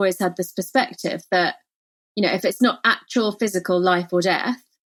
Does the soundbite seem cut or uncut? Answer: uncut